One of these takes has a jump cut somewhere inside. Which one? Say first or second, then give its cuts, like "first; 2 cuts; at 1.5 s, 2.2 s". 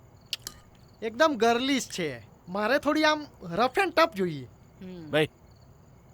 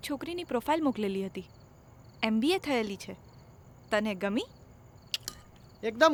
first; 1 cut; at 2.4 s